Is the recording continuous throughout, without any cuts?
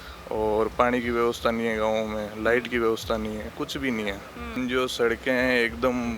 no; 1 cut; at 4.6 s

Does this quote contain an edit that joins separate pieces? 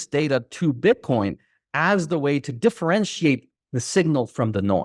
no; 0 cuts

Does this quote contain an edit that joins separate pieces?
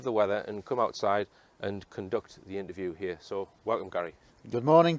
no; 0 cuts

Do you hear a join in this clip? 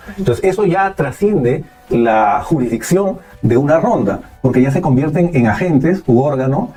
no; 0 cuts

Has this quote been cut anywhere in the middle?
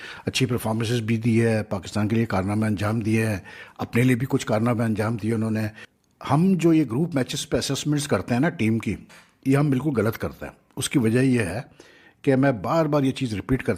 no; 0 cuts

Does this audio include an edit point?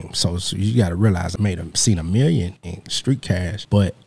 yes; 2 cuts; at 1.3 s, 3.1 s

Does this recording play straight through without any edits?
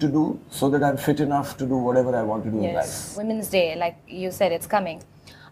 no; 1 cut; at 3.2 s

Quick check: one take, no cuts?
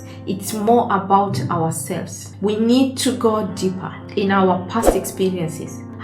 yes; 0 cuts

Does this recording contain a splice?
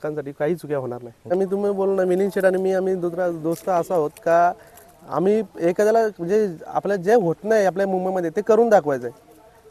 yes; 1 cut; at 1.3 s

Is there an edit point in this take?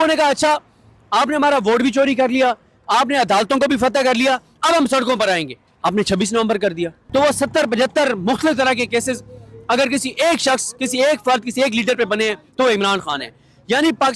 yes; 1 cut; at 7.0 s

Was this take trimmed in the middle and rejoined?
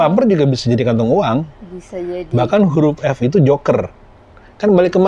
no; 0 cuts

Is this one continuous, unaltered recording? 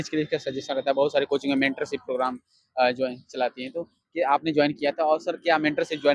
yes; 0 cuts

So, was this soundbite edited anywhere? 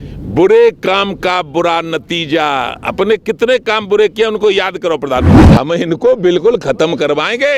yes; 1 cut; at 5.5 s

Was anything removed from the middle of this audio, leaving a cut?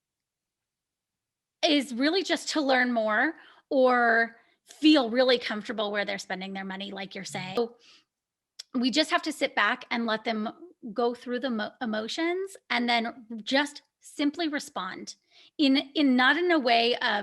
yes; 1 cut; at 7.6 s

